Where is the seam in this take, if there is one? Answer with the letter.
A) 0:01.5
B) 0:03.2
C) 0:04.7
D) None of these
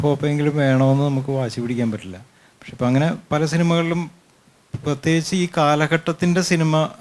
D